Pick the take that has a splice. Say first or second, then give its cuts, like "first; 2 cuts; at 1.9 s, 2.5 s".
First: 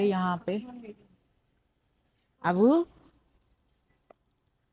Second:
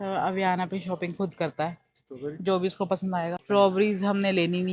second; 1 cut; at 3.4 s